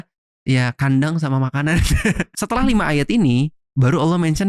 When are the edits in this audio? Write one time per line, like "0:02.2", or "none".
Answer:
0:02.2